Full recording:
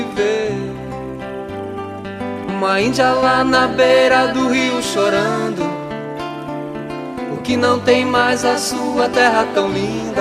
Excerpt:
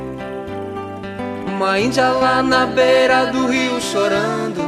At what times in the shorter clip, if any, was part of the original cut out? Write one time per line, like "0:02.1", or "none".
none